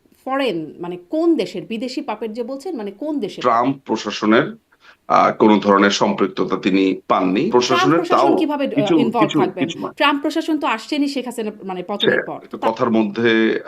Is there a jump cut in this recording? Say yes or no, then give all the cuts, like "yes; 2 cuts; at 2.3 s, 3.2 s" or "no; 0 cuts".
yes; 3 cuts; at 3.3 s, 7.5 s, 12.5 s